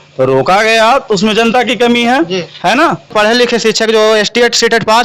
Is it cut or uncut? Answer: cut